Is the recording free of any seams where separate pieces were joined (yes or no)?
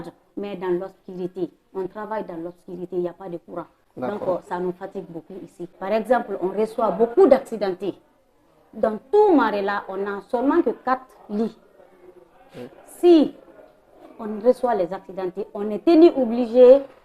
no